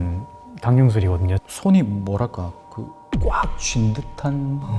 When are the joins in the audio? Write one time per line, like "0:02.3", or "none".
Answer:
0:01.3